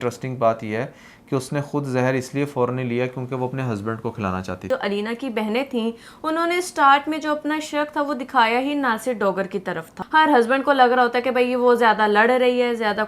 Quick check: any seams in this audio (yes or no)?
yes